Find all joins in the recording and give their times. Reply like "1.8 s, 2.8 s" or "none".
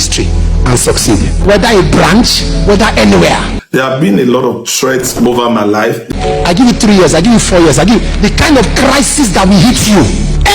3.5 s, 6.0 s